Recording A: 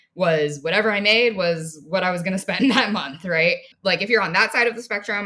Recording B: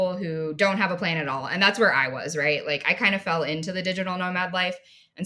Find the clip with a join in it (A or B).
A